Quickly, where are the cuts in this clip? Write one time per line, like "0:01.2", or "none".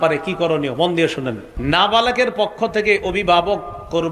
0:01.5